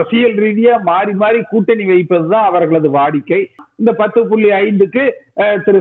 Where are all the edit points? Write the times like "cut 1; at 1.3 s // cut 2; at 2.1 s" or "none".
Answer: cut 1; at 3.6 s

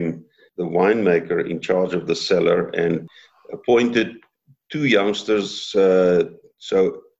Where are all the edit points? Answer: cut 1; at 3.1 s

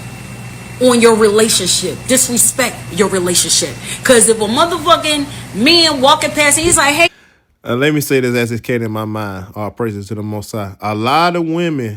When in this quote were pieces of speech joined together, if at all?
none

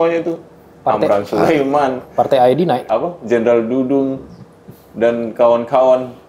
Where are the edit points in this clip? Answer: cut 1; at 2.8 s

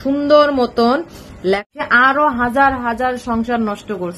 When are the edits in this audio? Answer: cut 1; at 1.7 s

